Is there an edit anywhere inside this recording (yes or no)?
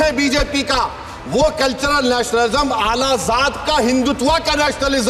no